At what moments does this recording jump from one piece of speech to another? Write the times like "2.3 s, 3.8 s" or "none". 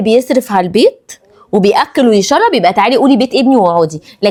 none